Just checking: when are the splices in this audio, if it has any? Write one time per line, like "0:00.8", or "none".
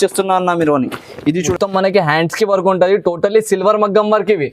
0:01.4

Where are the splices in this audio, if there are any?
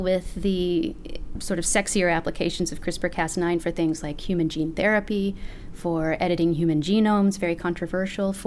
none

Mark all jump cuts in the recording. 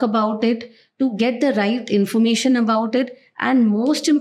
none

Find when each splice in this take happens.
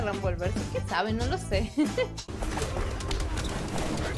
0:02.2

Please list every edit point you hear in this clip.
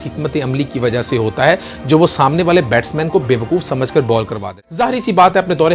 0:04.4

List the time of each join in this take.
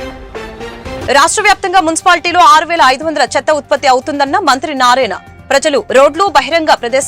0:01.0

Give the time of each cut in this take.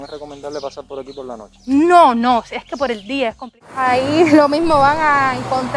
0:03.6

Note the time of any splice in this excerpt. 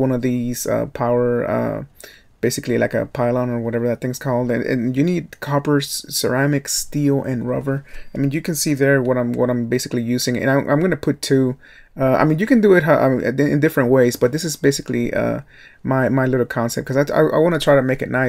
0:02.2

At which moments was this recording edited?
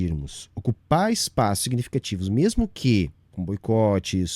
0:03.3

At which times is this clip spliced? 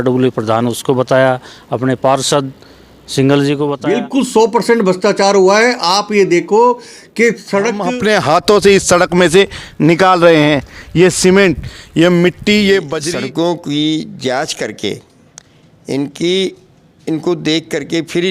0:03.7
0:07.8
0:13.0

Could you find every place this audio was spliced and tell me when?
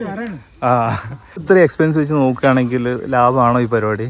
0:01.4

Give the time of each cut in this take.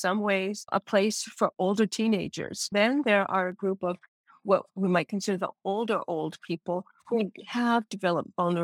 0:02.7

